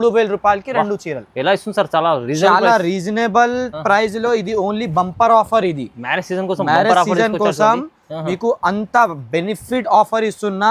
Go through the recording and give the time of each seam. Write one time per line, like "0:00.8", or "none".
none